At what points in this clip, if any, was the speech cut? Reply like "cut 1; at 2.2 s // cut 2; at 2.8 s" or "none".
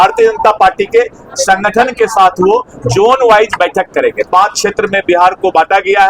none

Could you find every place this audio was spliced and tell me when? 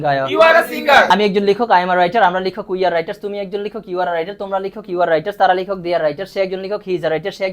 cut 1; at 1.1 s

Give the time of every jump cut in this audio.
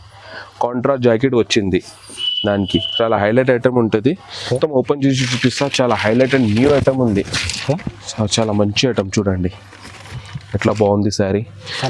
cut 1; at 4.6 s

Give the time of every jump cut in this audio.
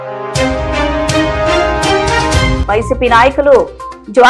cut 1; at 2.6 s

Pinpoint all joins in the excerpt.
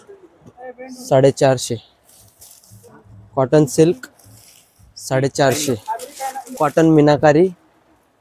cut 1; at 2.8 s // cut 2; at 6.4 s

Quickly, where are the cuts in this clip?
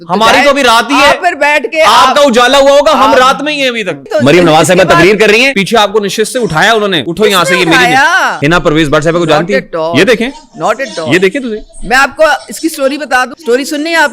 cut 1; at 4.0 s // cut 2; at 5.6 s // cut 3; at 7.0 s // cut 4; at 8.3 s // cut 5; at 13.4 s

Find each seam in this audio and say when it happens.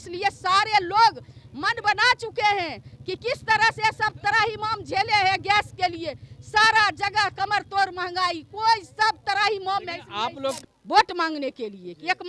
cut 1; at 10.6 s

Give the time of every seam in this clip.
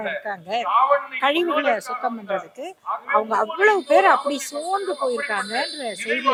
none

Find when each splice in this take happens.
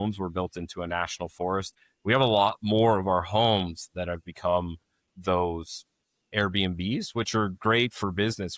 cut 1; at 1.7 s

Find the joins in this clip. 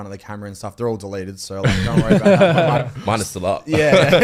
none

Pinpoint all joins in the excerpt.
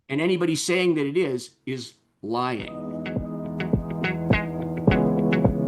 cut 1; at 2.7 s

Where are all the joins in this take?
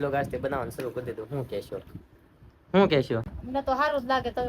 cut 1; at 3.4 s

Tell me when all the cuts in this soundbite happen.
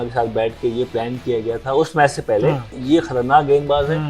cut 1; at 2.7 s

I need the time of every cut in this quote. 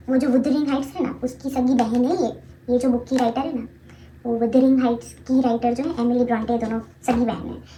none

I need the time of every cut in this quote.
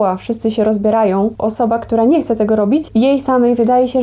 cut 1; at 1.4 s // cut 2; at 2.9 s

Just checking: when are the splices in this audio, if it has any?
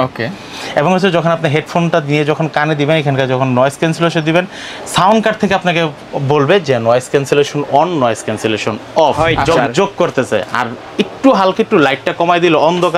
cut 1; at 9.2 s

